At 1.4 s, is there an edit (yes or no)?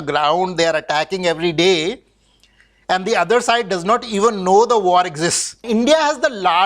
no